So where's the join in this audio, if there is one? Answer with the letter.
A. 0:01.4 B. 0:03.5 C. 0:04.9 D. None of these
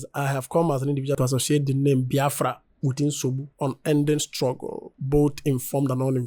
D